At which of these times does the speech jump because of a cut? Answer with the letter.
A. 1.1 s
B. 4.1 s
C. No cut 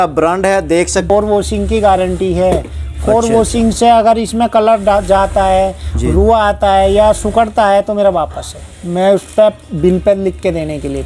A